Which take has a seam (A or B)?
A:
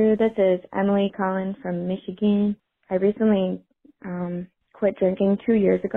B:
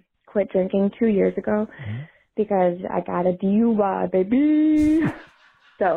A